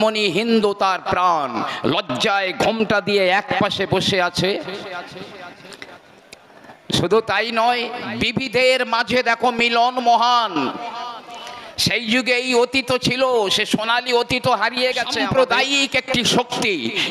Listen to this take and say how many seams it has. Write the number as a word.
one